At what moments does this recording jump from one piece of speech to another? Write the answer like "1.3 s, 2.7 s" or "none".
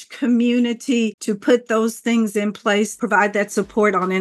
1.2 s